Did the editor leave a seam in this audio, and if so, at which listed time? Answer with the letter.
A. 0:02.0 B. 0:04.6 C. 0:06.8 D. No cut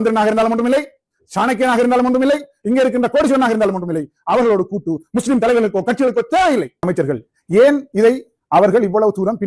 C